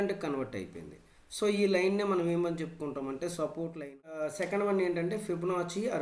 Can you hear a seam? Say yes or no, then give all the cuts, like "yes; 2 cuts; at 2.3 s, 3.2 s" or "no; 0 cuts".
yes; 1 cut; at 4.2 s